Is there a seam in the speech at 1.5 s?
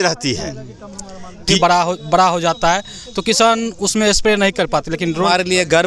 yes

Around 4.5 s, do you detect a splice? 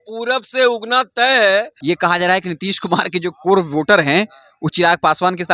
no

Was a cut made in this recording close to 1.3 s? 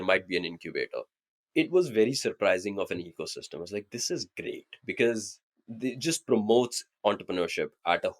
yes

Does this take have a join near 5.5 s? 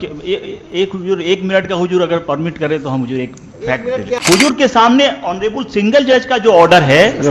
no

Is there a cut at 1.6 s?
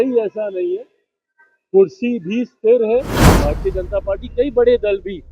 no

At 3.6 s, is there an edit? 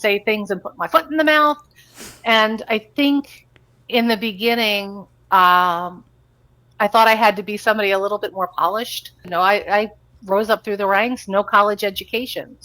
no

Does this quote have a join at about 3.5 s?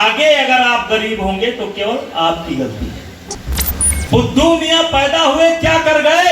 yes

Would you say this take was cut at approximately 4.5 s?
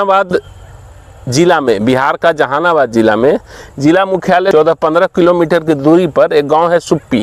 yes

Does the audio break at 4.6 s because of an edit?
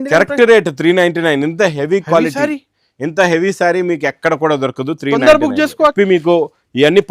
no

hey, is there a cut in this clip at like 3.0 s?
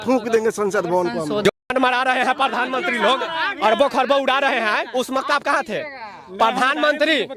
no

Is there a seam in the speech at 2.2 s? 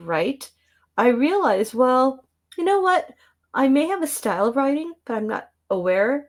no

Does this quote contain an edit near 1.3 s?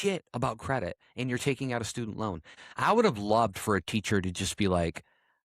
no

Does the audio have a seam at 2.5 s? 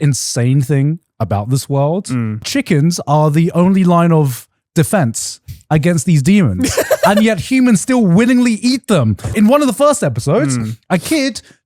yes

